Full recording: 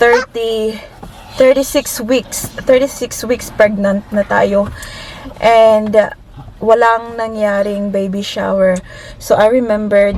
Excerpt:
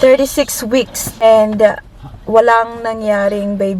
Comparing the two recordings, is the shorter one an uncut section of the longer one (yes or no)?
no